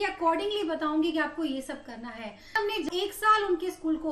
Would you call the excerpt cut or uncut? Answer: cut